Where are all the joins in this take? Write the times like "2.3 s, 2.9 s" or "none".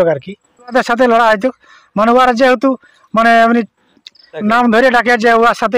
0.7 s, 4.4 s